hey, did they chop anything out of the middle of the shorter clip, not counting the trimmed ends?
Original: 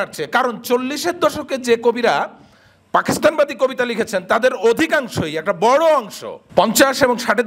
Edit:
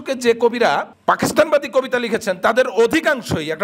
yes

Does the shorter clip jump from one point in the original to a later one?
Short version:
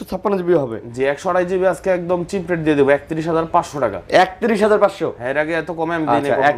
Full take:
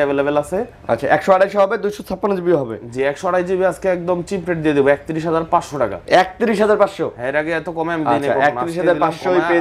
no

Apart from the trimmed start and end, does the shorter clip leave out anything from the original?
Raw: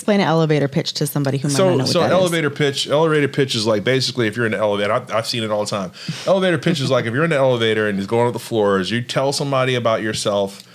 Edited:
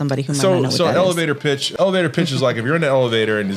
yes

